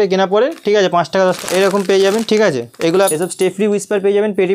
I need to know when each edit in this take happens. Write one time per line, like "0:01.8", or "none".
0:01.4
0:03.1